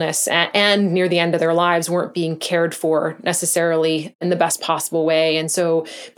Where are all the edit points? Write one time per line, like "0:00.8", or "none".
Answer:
0:04.2

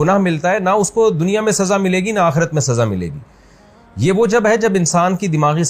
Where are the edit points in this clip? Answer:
none

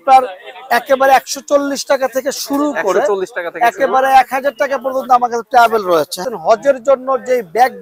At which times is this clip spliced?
0:06.2

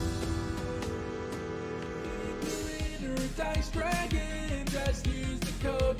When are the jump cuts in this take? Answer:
0:02.6

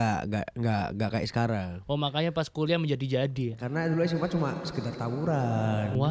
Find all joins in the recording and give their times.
none

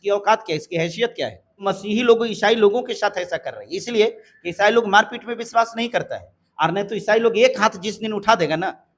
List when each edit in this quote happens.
0:01.6

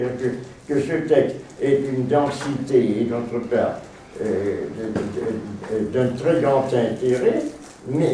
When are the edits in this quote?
0:04.9

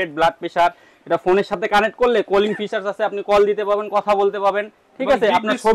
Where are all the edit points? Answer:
none

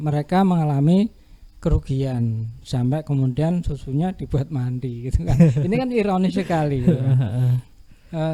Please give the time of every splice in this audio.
none

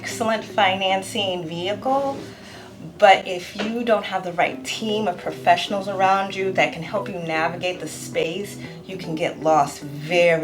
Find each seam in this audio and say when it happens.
none

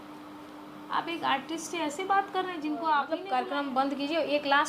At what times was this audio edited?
0:03.2

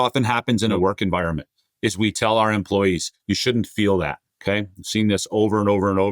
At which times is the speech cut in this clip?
0:00.7
0:02.2
0:04.3

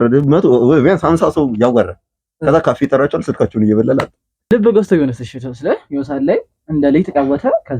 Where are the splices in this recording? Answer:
0:04.5

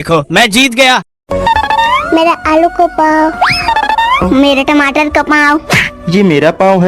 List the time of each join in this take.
0:01.1

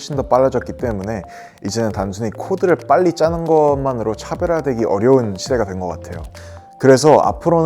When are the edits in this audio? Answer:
0:06.4

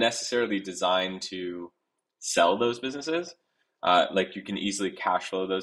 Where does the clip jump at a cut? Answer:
none

